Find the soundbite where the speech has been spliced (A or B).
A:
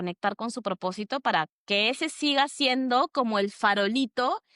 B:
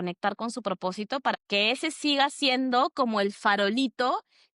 B